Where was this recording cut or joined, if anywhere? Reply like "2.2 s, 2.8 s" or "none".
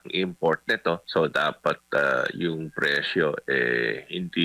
1.0 s